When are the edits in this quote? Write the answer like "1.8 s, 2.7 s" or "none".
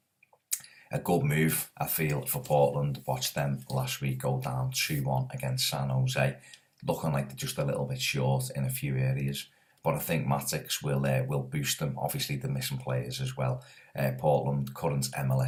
none